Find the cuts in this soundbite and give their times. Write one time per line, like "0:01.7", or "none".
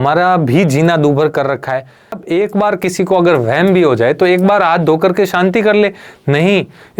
0:02.2